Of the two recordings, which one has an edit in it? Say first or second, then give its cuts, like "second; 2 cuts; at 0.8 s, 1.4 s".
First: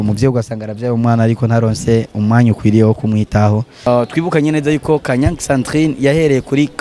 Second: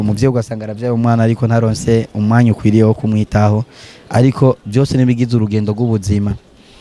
first; 1 cut; at 3.9 s